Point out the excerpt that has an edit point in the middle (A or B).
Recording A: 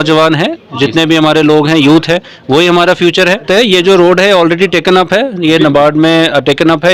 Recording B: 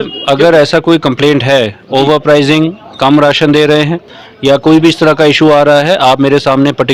A